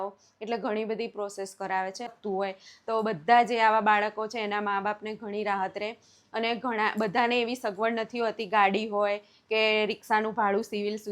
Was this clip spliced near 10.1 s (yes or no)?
no